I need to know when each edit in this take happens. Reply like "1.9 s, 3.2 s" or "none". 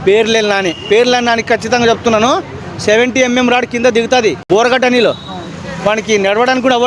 4.4 s